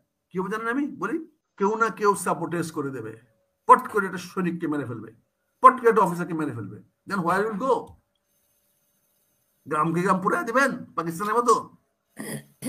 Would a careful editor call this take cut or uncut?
cut